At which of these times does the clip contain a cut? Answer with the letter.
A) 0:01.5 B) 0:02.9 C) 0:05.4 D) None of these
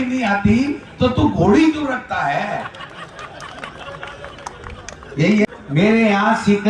C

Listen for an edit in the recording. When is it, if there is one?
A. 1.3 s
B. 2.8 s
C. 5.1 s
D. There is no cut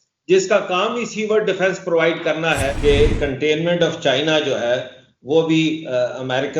B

